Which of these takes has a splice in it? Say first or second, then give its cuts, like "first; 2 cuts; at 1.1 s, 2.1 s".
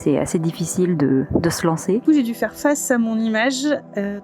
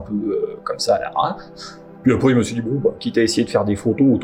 first; 1 cut; at 2.0 s